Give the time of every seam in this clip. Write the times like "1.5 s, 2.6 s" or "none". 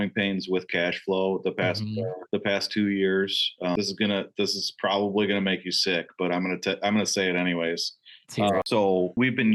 none